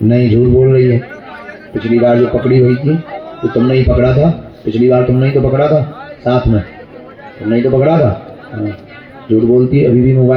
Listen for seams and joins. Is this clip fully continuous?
yes; 0 cuts

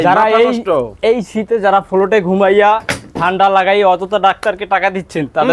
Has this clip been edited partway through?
no; 0 cuts

